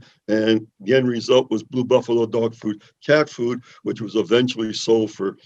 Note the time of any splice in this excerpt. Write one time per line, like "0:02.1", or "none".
none